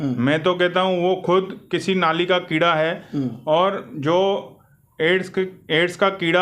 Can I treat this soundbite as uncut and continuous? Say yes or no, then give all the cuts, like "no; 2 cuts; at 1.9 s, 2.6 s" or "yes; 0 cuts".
yes; 0 cuts